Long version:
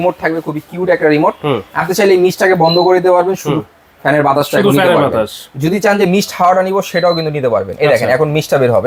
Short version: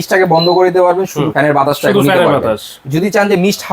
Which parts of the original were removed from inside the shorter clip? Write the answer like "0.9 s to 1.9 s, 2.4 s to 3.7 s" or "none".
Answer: 3.5 s to 3.9 s

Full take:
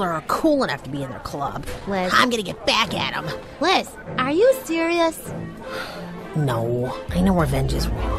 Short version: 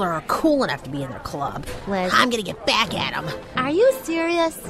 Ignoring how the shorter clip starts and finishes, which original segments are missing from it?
3.4 s to 4.0 s

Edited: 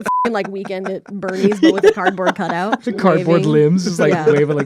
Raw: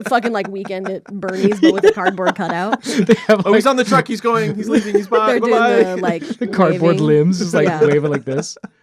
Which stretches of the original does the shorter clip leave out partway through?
2.8 s to 6.3 s

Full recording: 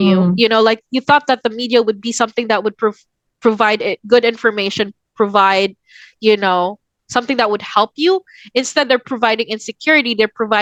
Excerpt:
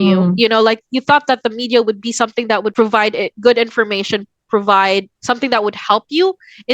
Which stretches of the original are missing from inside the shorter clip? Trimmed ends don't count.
2.7 s to 3.4 s, 5.8 s to 7.0 s

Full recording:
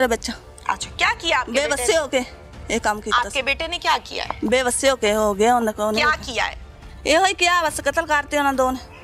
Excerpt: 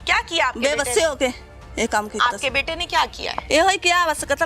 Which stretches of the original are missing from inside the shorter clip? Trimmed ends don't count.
4.2 s to 6.8 s

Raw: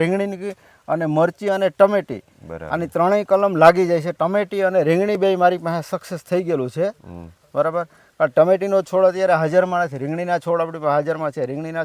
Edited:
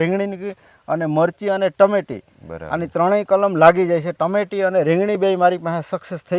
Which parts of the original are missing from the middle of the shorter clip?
none

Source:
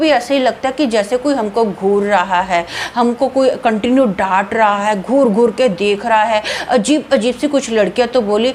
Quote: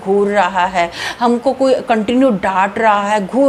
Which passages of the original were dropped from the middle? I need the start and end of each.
none

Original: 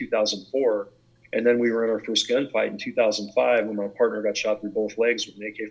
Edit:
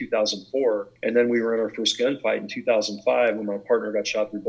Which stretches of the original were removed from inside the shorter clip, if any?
0.9 s to 1.2 s

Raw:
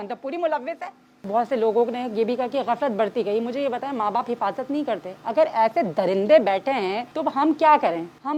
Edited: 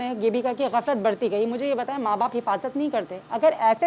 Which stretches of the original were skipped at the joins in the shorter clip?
none

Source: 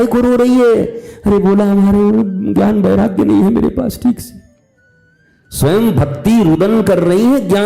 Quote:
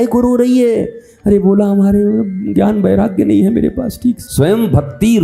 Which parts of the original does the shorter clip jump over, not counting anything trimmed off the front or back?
4.3 s to 5.5 s

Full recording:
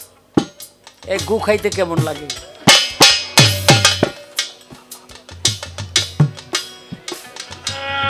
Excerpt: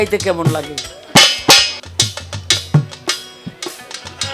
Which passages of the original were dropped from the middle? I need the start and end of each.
3.2 s to 5.1 s

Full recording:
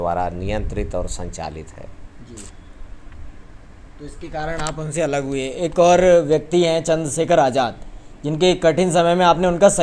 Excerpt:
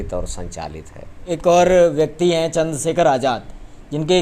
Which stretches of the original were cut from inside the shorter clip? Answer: 2.0 s to 5.5 s

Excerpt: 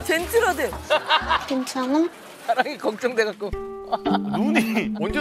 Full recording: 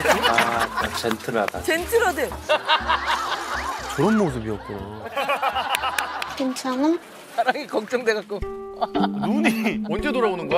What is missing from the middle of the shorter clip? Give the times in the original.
3.0 s to 6.3 s

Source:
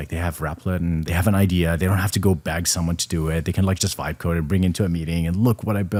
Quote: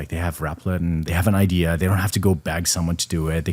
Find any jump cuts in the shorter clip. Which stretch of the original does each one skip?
none

